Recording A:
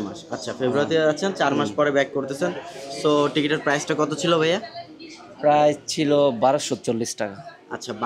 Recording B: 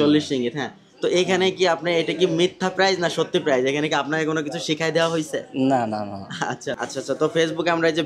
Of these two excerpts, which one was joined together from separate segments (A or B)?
B